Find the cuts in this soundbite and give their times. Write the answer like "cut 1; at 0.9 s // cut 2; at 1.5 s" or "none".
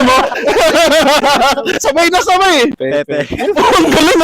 cut 1; at 2.8 s